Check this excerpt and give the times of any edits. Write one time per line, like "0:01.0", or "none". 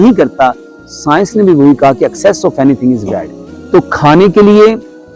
0:03.5

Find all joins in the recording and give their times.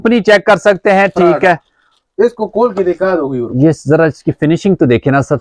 none

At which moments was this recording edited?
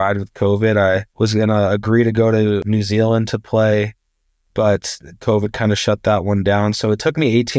0:01.1
0:02.6

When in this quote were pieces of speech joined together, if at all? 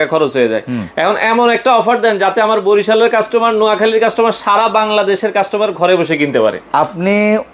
none

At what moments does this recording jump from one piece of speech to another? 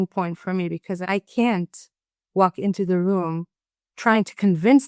0:01.0
0:03.8

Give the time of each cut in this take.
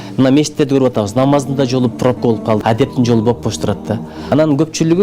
0:02.6
0:04.1

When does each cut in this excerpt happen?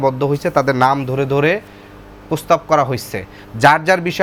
none

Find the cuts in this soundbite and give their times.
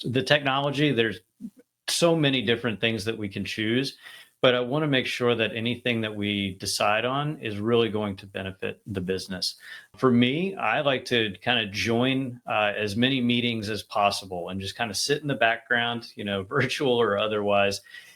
0:09.9

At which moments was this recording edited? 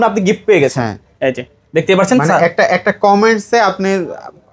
none

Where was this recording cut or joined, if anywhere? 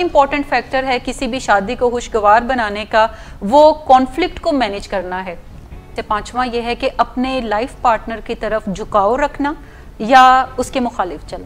0:05.9

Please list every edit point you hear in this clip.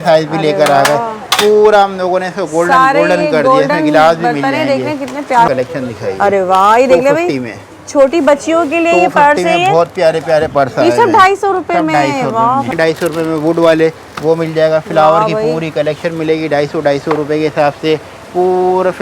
0:05.5
0:12.7

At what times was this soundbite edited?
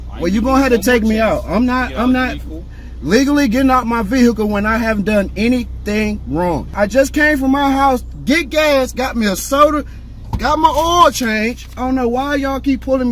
0:06.7
0:11.8

